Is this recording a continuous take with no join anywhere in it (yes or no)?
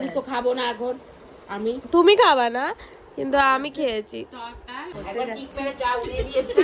no